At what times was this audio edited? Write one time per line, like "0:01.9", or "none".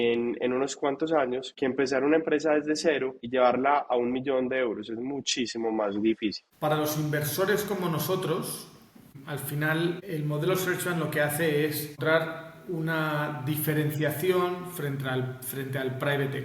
0:01.5
0:03.2
0:06.5
0:09.1
0:10.0
0:12.0